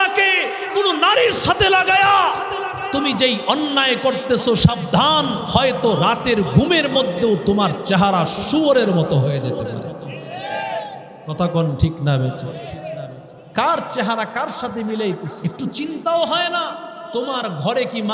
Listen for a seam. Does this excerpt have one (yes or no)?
yes